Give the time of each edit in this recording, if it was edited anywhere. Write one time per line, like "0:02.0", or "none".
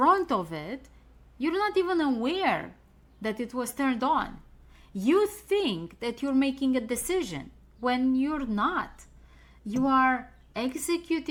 none

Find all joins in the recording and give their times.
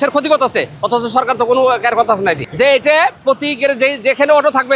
0:02.5

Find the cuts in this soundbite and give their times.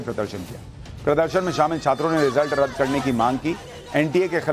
none

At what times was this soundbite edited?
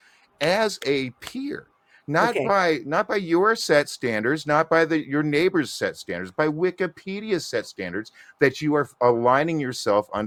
none

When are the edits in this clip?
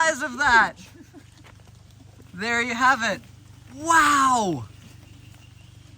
none

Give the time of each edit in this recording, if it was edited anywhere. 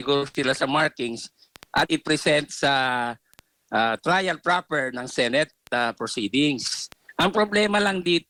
none

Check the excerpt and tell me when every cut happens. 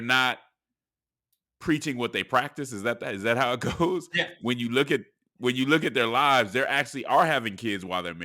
none

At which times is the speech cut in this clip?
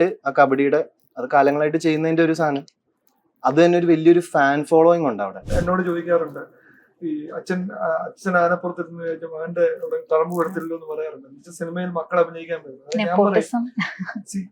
0:05.4

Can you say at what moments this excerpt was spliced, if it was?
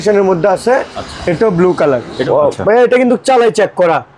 0:02.1

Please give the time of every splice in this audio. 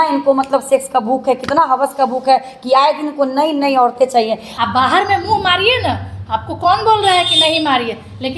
0:04.5

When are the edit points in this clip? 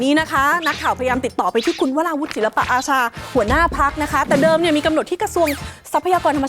none

